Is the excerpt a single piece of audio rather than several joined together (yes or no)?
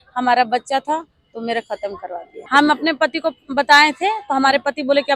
no